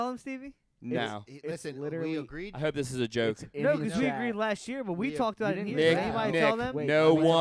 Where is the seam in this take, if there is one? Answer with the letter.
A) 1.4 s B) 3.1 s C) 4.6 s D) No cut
D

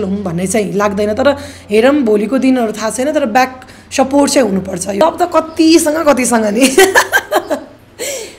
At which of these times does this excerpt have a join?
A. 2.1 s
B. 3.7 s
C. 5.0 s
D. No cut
C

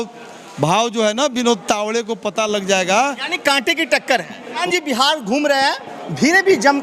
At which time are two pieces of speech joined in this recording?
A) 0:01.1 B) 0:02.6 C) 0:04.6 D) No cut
C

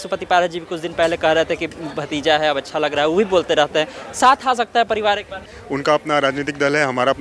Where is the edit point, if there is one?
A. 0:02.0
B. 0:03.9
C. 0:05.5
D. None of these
C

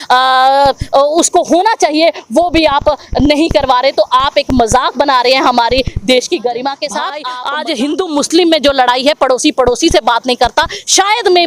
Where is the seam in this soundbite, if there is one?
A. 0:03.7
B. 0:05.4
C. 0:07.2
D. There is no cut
C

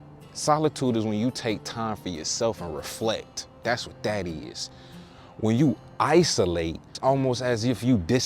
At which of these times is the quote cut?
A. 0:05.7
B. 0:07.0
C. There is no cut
B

